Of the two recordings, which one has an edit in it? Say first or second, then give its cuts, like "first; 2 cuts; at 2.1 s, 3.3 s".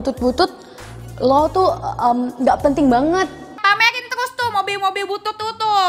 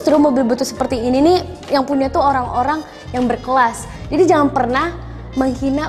second; 2 cuts; at 1.6 s, 3.9 s